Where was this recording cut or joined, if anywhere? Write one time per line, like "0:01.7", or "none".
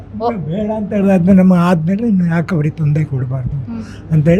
none

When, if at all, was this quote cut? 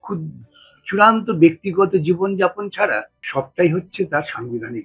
0:03.2

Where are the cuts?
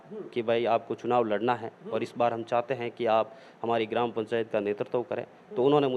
none

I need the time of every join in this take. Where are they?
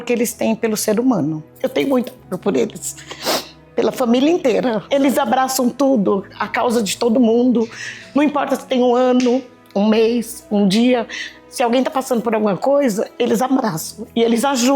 0:01.5
0:04.8

